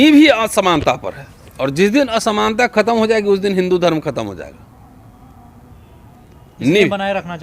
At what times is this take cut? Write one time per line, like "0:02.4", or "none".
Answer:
none